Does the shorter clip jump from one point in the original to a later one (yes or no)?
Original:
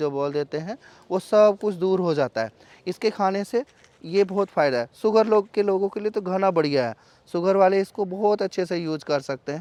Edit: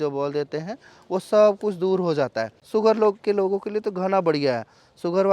yes